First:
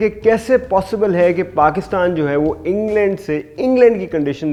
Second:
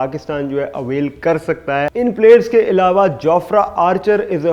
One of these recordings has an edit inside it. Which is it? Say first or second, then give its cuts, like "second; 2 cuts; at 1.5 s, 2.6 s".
second; 1 cut; at 1.9 s